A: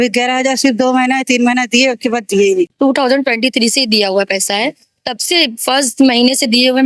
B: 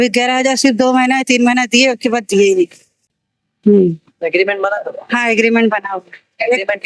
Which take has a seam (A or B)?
A